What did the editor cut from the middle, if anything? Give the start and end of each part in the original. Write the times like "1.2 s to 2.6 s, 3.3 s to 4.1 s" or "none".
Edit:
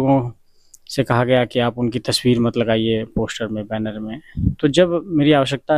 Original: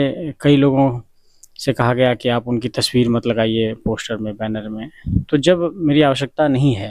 none

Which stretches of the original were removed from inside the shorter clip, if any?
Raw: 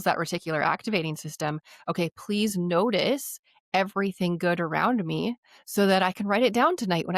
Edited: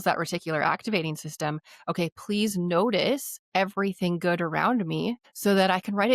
3.3 s to 3.5 s, 5.4 s to 5.6 s

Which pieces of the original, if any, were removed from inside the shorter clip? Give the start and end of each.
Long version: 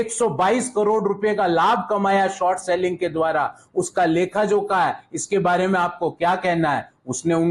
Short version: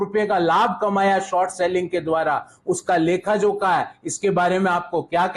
none

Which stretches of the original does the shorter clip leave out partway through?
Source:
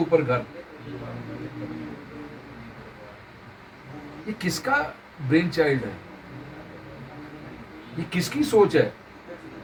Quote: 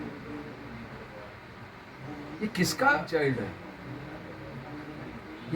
5.0 s to 5.6 s

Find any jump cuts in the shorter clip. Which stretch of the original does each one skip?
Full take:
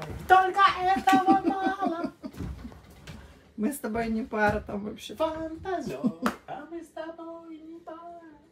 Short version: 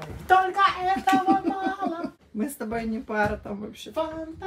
2.2 s to 3.4 s

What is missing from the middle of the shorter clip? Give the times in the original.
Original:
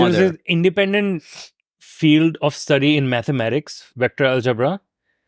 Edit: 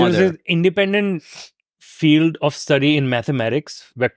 none

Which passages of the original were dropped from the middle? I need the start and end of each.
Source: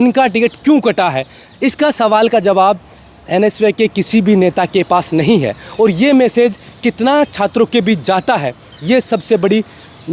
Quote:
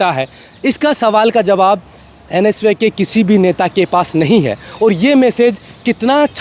none

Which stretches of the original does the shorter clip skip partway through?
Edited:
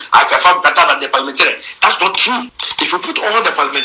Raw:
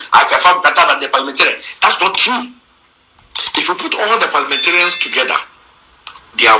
2.6 s to 3.4 s

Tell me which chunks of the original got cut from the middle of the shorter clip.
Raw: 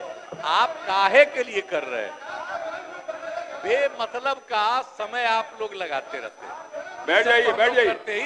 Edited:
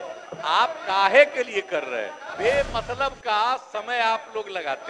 2.3 s to 3.5 s

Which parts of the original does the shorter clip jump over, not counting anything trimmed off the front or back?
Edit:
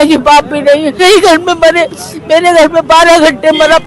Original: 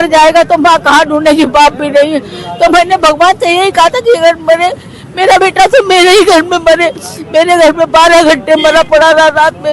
2.3 s to 6.0 s

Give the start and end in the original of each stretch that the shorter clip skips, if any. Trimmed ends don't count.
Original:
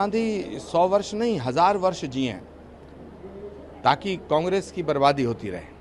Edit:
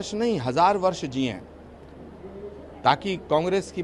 none

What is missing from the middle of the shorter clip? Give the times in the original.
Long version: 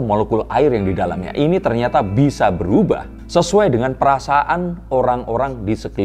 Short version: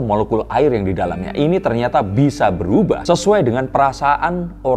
3.0 s to 3.3 s

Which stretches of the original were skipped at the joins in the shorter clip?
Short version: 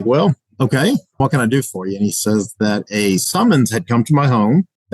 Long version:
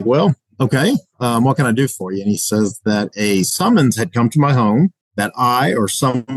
1.2 s to 1.5 s

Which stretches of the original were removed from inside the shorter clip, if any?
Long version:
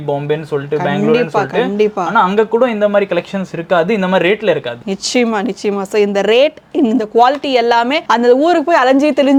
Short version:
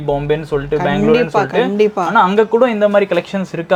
none

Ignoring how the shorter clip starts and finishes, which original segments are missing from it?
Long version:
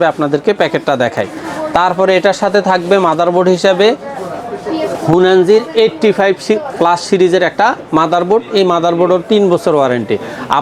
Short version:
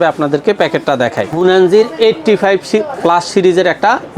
1.3 s to 5.1 s

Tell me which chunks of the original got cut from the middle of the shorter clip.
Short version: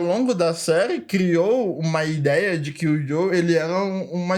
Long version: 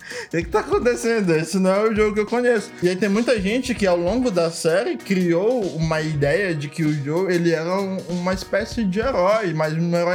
none

